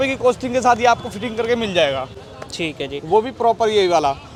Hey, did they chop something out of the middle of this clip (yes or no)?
no